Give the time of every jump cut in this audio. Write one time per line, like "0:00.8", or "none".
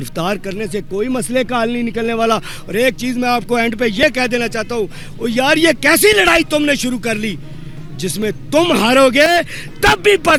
none